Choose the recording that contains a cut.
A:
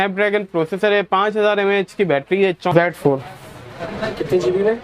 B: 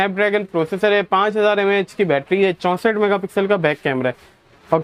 A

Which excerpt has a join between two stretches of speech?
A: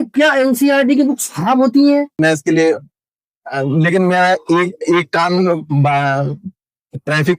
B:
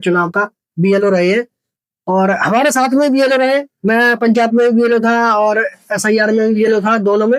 A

